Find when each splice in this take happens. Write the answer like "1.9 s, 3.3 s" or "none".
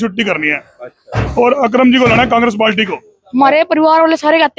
3.2 s